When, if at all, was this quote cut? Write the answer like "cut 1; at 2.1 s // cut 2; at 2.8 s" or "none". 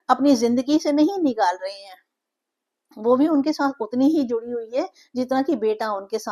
none